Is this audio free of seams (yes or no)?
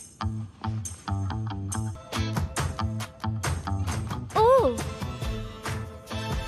no